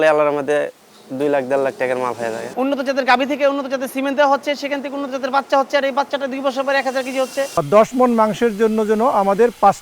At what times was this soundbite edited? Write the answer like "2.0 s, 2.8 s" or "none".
2.5 s, 7.5 s

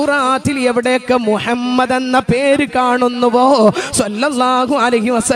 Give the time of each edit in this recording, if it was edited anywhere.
none

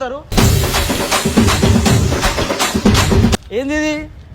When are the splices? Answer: 3.3 s

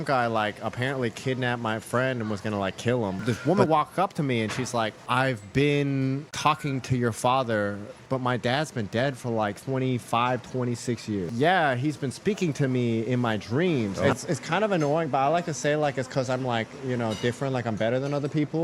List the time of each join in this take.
3.2 s, 5.0 s, 8.0 s, 9.6 s, 11.2 s, 14.0 s

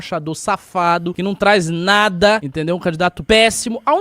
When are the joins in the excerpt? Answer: 1.2 s, 3.0 s

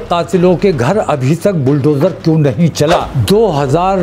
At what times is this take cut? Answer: 3.1 s

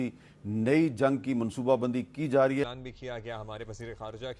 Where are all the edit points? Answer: 2.6 s

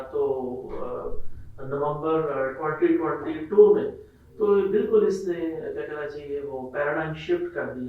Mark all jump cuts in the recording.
none

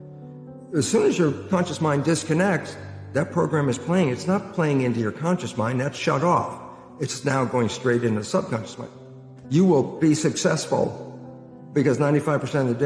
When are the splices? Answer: 9.0 s

